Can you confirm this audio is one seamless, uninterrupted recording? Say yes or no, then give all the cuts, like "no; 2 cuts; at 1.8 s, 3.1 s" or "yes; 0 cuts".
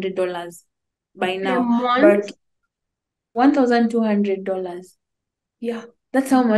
no; 1 cut; at 3.2 s